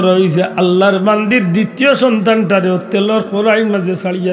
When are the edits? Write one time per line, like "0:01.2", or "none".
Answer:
none

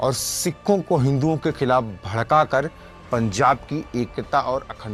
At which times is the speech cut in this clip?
none

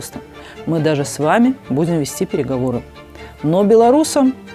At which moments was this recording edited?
none

